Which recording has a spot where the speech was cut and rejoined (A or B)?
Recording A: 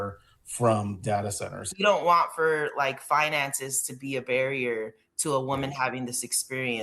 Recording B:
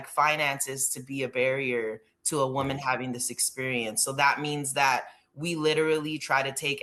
A